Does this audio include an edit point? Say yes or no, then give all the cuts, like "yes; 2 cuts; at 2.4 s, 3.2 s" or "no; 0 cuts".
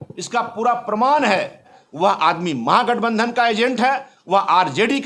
yes; 1 cut; at 1.8 s